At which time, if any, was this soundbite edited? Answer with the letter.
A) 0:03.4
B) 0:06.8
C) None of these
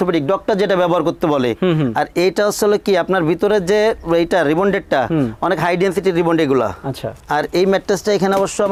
C